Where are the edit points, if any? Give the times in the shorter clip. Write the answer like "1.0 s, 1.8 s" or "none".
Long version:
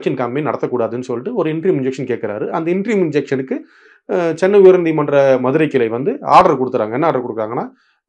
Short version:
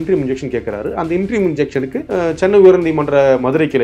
2.0 s